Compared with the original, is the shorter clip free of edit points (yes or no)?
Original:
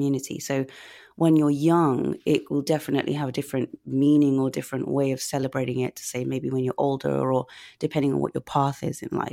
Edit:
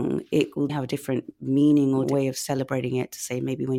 no